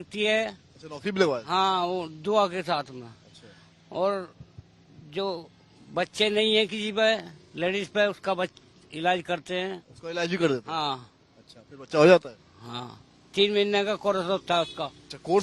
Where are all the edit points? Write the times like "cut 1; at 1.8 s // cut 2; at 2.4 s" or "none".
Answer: none